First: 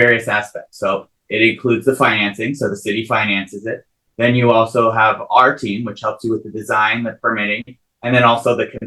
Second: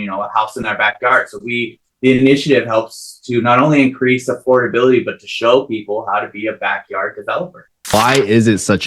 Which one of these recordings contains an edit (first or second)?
second